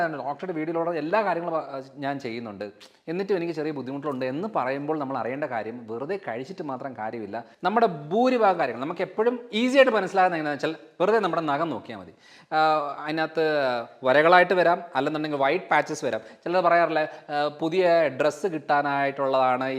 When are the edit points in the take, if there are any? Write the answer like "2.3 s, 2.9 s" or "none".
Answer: 7.5 s